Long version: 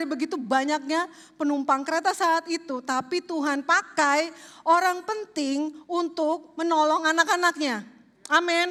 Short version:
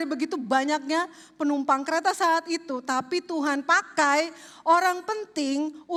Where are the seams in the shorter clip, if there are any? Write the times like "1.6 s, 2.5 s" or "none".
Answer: none